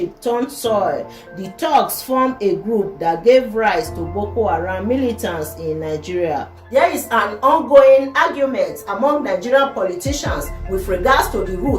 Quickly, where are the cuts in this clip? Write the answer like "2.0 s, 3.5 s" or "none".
6.6 s

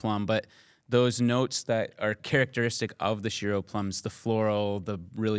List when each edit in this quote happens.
2.2 s

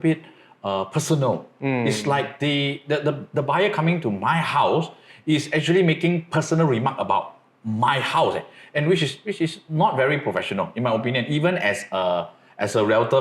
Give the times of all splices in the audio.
none

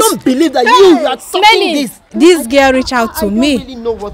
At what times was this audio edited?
2.0 s

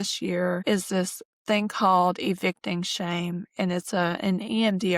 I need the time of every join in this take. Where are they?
1.0 s

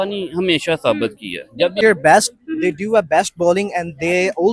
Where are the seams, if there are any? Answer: 1.8 s

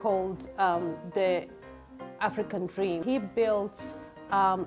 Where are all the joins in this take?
3.0 s

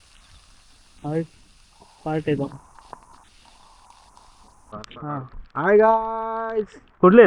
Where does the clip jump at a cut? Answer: 4.8 s

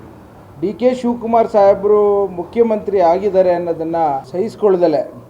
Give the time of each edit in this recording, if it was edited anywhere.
4.3 s

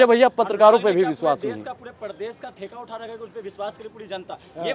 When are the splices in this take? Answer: none

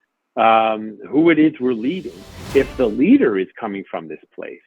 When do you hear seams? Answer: 2.4 s

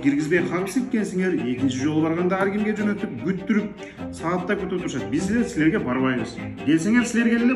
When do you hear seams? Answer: none

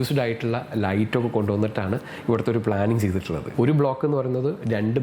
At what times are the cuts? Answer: 3.4 s

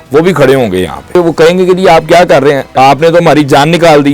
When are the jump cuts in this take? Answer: 1.2 s, 2.7 s

